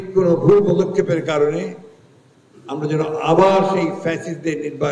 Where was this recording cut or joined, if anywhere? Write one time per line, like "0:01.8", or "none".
none